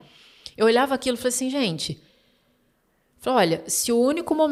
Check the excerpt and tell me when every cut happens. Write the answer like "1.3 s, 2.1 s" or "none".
none